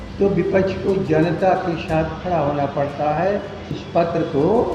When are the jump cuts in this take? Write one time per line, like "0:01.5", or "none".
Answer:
0:03.8